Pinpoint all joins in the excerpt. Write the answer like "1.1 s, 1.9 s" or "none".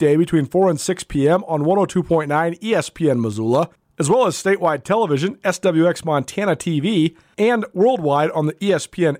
3.8 s, 7.2 s